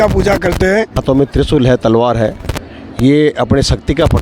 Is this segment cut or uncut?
cut